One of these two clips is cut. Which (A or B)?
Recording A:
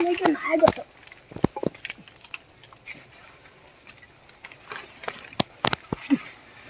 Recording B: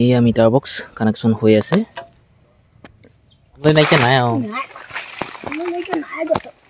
B